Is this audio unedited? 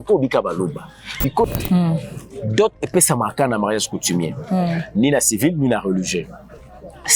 no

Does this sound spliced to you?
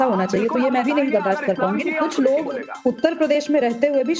yes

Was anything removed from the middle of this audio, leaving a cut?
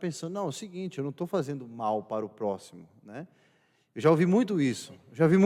no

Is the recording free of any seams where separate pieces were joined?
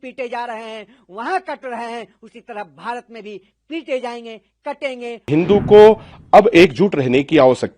no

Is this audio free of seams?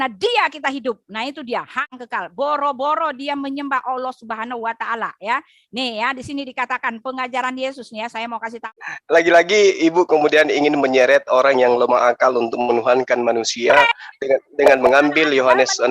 no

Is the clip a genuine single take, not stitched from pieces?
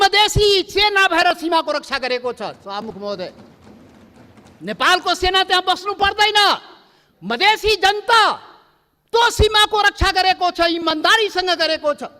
yes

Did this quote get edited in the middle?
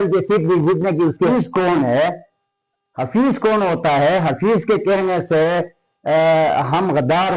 yes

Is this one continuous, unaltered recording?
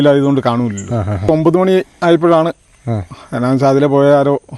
no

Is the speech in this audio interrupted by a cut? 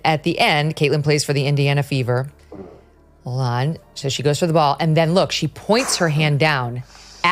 no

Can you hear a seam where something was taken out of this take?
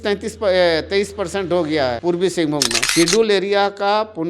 yes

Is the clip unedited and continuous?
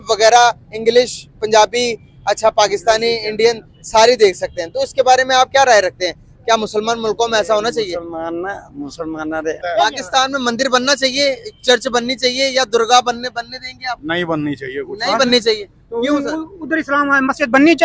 no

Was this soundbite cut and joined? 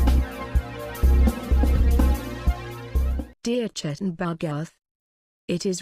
yes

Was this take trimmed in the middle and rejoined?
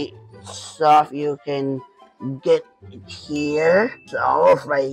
no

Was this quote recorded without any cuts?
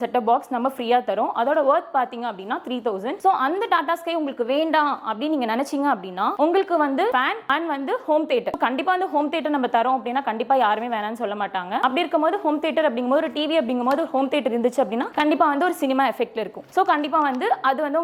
yes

